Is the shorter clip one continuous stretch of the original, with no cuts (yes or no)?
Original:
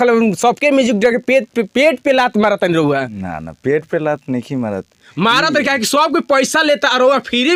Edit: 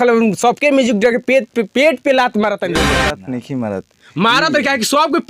no